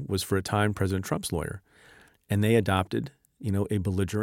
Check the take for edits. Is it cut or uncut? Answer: uncut